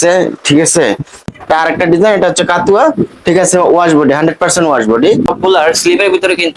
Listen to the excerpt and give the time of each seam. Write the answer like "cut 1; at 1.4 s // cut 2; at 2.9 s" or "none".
cut 1; at 1.3 s // cut 2; at 5.3 s